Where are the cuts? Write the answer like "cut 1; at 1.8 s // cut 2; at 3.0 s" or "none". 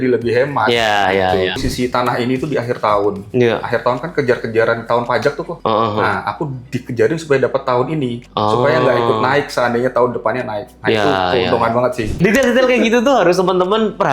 cut 1; at 1.6 s // cut 2; at 12.2 s